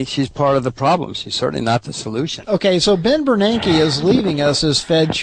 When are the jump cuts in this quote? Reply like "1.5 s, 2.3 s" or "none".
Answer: 1.6 s